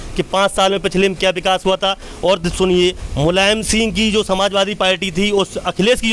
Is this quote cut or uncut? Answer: uncut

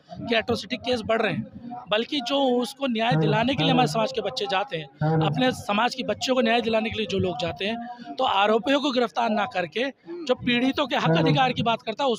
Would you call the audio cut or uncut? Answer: uncut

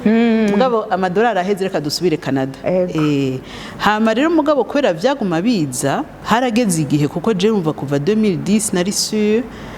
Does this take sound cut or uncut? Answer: cut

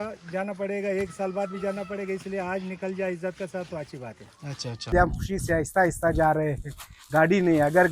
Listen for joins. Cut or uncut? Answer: cut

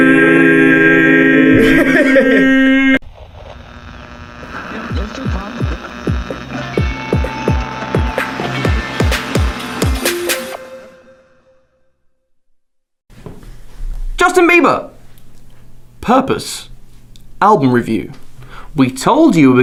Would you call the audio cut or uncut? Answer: uncut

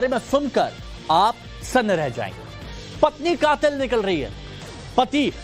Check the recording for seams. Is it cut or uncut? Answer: cut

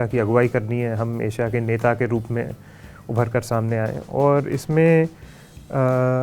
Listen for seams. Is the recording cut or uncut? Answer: uncut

